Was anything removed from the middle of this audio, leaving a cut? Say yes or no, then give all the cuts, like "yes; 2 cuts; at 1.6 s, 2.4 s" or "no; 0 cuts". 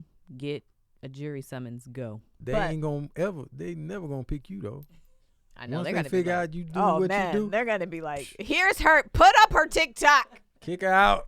yes; 1 cut; at 2.3 s